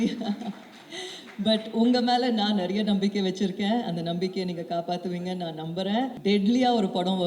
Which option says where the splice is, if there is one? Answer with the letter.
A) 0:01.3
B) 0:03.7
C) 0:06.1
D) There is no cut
C